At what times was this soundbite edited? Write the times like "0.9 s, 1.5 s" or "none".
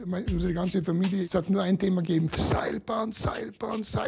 1.3 s

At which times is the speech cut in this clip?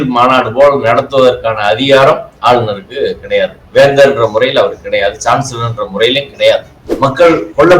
6.9 s

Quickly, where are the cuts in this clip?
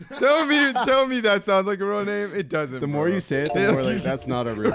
none

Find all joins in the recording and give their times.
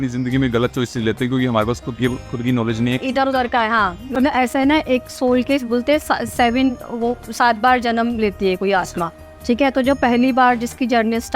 4.1 s

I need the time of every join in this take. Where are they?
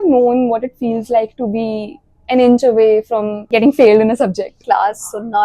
3.4 s, 4.6 s

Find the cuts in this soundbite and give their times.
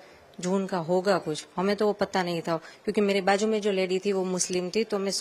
none

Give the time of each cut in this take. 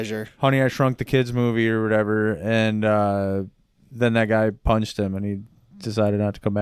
none

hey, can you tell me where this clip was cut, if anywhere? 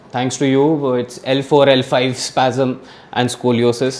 none

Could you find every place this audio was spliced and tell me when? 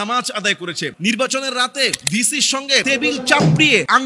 0.9 s

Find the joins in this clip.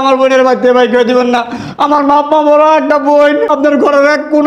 3.5 s

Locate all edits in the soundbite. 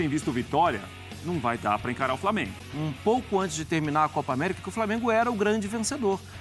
2.6 s

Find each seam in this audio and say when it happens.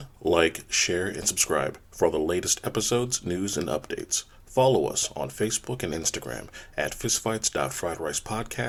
none

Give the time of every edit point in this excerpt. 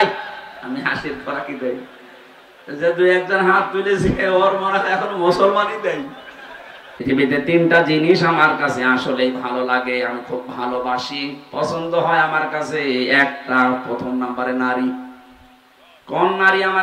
7.0 s

